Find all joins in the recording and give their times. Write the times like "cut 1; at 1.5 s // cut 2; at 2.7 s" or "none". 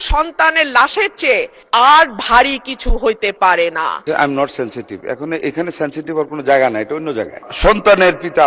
cut 1; at 1.6 s // cut 2; at 4.0 s // cut 3; at 7.4 s